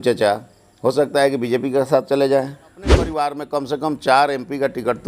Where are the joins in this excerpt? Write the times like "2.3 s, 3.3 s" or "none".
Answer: 3.2 s